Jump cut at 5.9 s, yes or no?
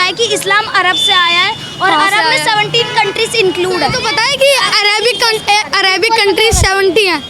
no